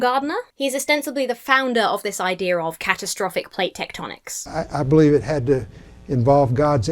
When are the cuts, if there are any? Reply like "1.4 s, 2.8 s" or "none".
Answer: 4.4 s